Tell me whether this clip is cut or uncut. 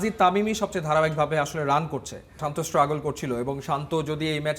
cut